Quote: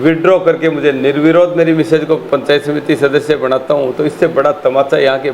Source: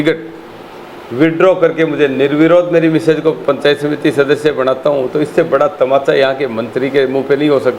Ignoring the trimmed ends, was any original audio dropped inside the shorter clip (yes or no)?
no